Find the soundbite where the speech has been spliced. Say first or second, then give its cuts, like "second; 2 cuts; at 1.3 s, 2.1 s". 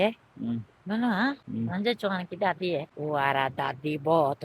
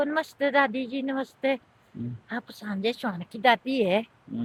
first; 2 cuts; at 1.4 s, 2.9 s